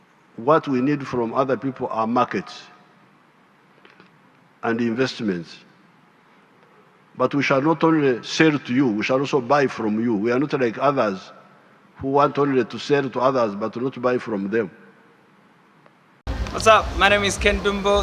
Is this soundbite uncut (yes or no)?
no